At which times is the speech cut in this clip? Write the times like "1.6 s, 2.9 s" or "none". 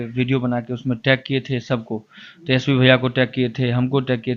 none